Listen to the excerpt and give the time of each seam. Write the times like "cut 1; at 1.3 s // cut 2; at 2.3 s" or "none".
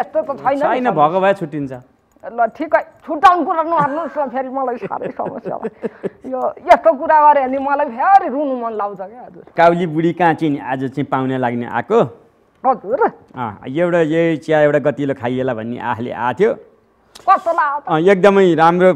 cut 1; at 9.5 s